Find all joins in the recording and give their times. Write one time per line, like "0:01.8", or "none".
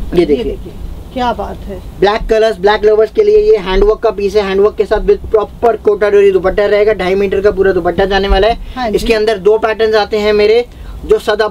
none